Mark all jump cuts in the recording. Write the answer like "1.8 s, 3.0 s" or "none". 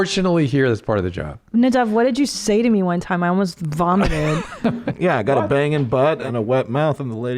4.9 s, 6.2 s